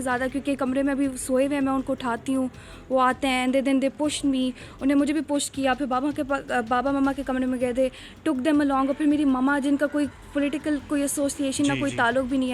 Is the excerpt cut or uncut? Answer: uncut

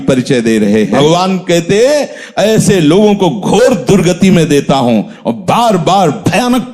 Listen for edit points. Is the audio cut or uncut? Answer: cut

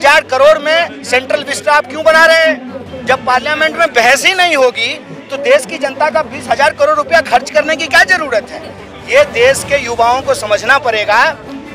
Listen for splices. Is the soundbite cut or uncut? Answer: uncut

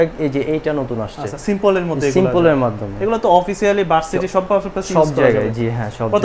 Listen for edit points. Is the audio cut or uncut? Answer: uncut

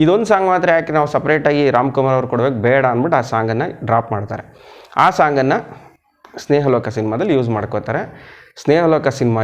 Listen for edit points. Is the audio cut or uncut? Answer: uncut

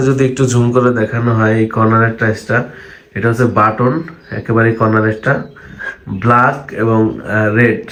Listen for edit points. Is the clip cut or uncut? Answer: uncut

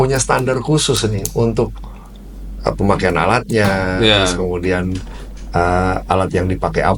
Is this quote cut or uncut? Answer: uncut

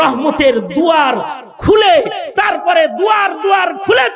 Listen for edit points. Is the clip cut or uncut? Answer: uncut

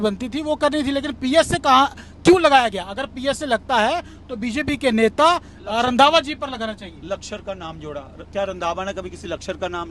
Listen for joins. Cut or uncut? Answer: uncut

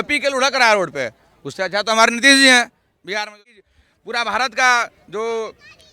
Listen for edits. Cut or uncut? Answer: cut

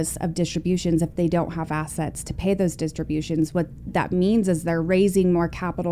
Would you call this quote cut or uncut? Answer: uncut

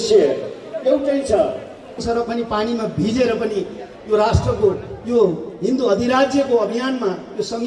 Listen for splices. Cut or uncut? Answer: cut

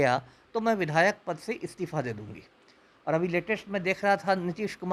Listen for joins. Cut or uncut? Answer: uncut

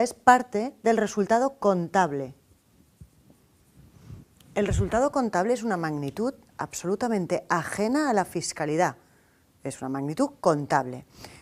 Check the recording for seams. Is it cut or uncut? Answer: uncut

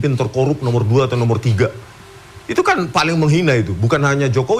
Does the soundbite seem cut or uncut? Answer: uncut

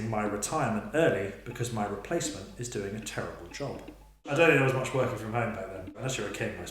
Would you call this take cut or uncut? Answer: cut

